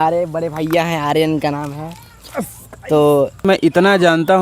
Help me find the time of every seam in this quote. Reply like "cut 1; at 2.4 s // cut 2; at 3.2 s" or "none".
cut 1; at 3.4 s